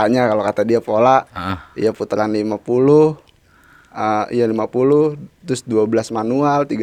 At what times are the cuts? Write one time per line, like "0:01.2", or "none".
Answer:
none